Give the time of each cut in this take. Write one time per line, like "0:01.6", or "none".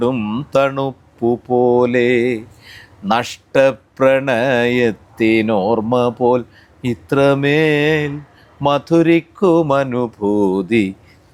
none

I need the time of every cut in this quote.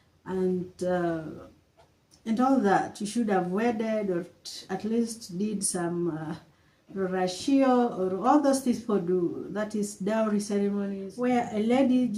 0:11.1

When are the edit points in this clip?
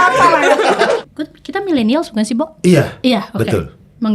0:00.9

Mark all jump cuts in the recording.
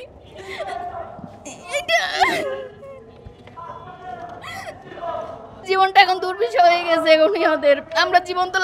0:05.5

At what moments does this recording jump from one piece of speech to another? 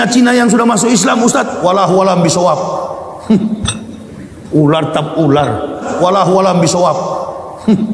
0:01.3
0:05.9

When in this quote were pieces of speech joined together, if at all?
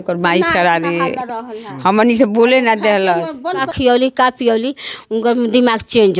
0:03.7

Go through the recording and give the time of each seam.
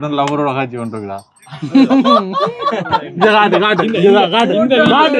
none

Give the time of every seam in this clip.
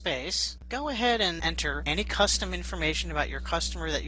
none

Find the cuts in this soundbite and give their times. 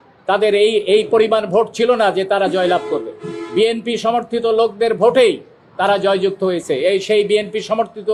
none

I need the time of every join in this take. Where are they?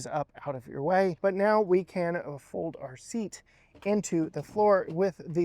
0:01.2

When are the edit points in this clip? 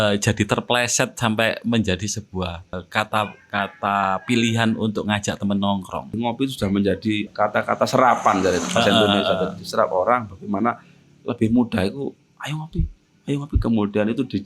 0:02.8
0:06.1
0:07.2

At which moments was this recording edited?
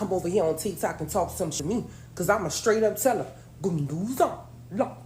0:01.5

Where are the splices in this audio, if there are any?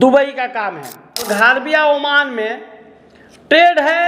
0:01.3

